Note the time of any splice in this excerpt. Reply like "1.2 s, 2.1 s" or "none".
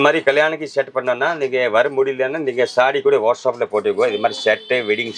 none